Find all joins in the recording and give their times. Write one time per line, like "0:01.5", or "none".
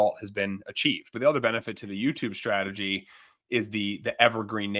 0:01.1